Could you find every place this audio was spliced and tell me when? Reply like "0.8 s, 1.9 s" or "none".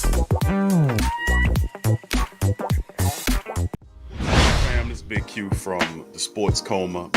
3.8 s, 4.7 s

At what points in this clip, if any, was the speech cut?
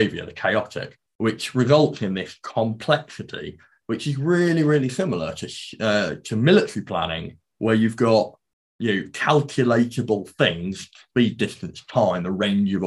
none

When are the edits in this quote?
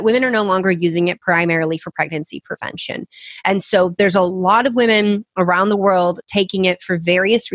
none

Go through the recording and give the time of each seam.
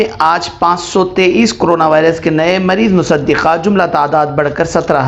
none

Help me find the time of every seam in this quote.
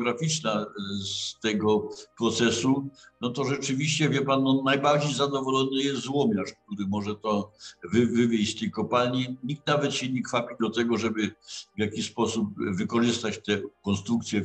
none

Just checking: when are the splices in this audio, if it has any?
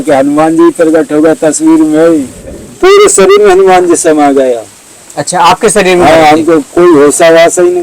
2.4 s

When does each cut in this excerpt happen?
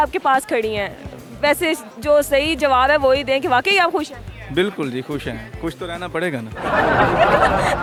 none

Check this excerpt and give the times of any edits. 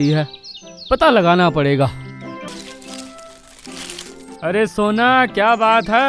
2.5 s

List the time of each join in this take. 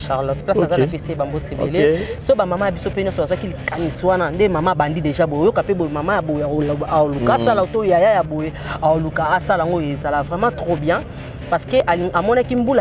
none

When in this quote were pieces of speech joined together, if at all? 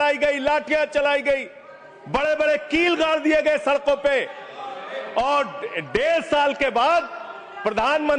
none

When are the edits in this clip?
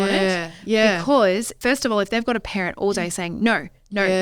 1.6 s

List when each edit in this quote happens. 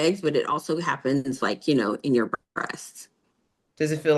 3.2 s

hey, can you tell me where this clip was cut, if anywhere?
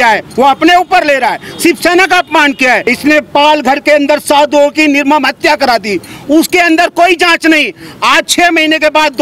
2.8 s

